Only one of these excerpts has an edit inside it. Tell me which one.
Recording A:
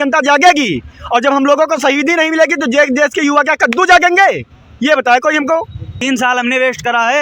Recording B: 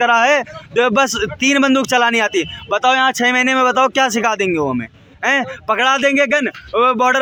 A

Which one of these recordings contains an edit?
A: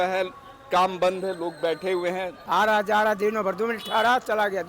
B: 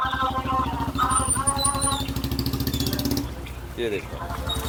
A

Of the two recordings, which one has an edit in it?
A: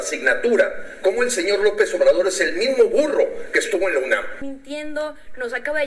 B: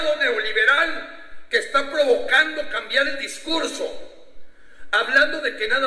A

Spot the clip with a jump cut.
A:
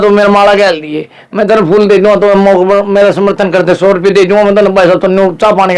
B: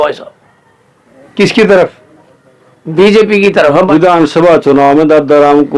B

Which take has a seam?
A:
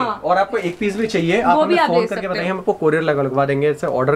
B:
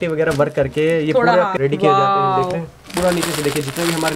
B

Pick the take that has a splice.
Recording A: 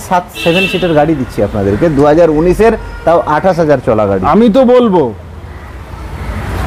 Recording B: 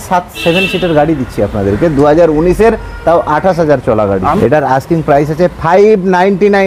B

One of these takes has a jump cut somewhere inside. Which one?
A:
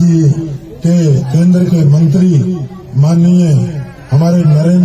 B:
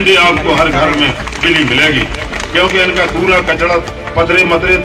A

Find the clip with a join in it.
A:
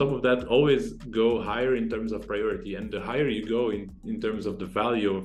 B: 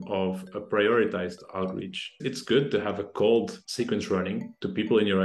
B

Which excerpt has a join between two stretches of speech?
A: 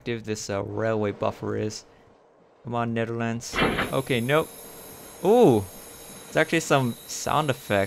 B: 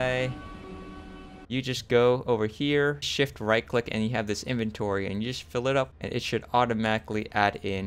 B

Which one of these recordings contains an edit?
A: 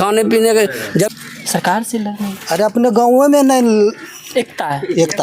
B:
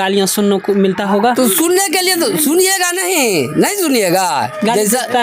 A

